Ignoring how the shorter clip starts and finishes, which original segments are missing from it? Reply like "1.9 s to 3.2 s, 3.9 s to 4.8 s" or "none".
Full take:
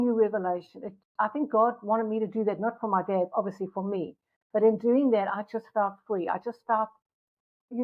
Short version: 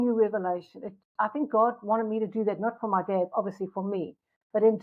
none